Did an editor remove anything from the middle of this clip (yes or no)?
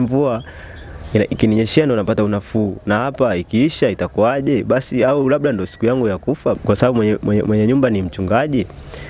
yes